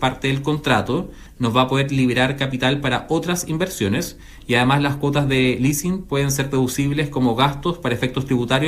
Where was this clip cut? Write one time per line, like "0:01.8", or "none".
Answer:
0:01.2